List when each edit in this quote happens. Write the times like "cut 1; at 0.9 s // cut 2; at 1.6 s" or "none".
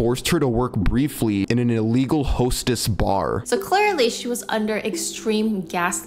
cut 1; at 1.5 s // cut 2; at 3.4 s